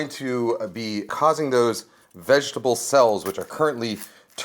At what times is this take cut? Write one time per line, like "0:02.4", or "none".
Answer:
0:01.1